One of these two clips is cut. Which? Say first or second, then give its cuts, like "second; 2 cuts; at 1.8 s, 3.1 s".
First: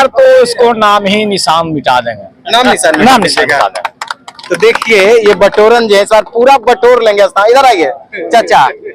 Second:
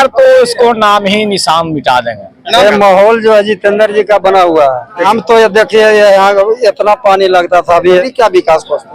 second; 3 cuts; at 2.6 s, 5.1 s, 8.0 s